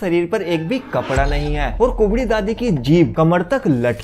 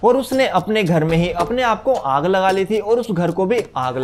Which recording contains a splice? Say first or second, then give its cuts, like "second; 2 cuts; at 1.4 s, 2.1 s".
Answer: first; 2 cuts; at 1.7 s, 3.1 s